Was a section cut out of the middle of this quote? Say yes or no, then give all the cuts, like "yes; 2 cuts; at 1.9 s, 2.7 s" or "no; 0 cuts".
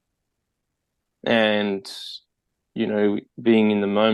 no; 0 cuts